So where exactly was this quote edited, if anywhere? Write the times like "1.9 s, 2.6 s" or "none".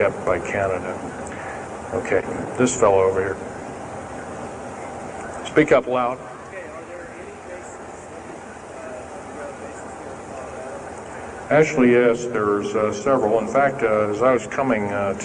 none